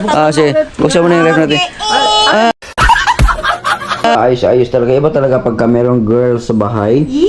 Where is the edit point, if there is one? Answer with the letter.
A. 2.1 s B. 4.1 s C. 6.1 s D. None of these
B